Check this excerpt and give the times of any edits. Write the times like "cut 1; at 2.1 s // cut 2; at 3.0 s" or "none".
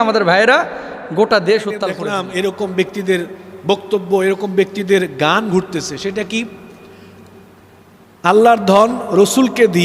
cut 1; at 2.0 s